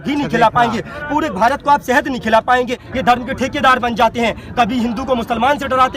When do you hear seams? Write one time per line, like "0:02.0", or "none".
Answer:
0:02.9